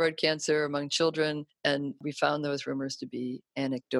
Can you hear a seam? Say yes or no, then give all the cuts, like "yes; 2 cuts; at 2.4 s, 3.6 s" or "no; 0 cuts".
yes; 1 cut; at 1.5 s